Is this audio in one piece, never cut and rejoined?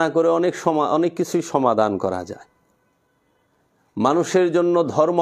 yes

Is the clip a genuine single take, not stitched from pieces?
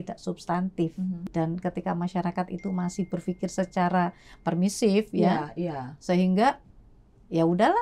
no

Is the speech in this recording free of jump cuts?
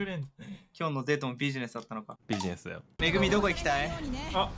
no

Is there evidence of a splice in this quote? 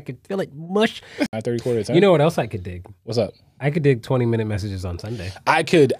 yes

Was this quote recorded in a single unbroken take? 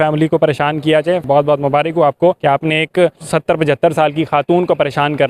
no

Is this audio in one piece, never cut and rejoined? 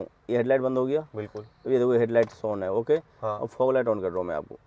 yes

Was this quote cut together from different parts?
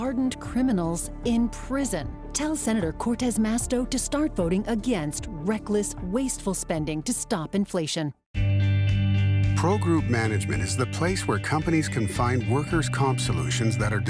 yes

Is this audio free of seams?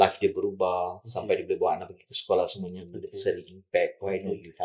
yes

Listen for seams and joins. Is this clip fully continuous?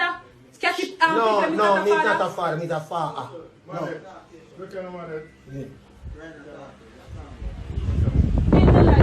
yes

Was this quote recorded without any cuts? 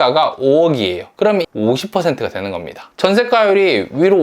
no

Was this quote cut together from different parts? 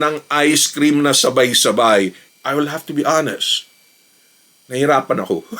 yes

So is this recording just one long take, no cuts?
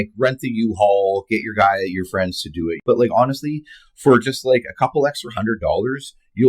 no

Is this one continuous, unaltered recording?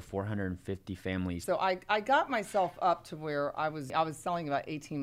no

